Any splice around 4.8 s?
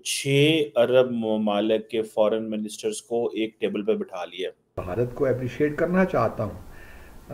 yes; 1 cut; at 4.8 s

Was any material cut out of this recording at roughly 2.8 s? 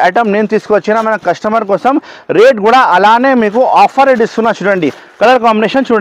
no; 0 cuts

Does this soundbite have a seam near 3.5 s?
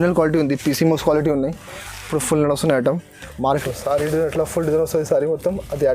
yes; 1 cut; at 3.5 s

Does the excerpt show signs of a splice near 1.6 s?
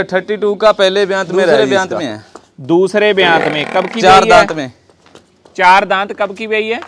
yes; 1 cut; at 1.6 s

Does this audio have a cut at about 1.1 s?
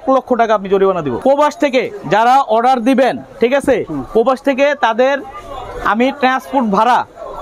yes; 1 cut; at 1.1 s

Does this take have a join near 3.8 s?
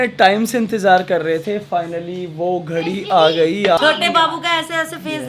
yes; 1 cut; at 3.8 s

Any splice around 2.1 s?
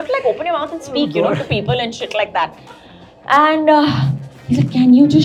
no; 0 cuts

